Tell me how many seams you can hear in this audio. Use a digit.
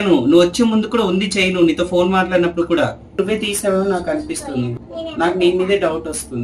2